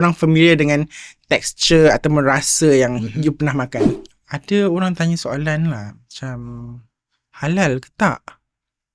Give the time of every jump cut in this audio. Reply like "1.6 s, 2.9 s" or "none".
3.9 s